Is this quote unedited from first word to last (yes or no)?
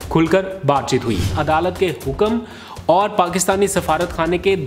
no